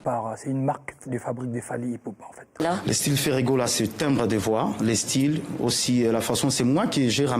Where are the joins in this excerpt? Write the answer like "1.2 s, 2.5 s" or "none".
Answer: 2.6 s